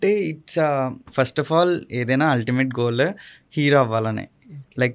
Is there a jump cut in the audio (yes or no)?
no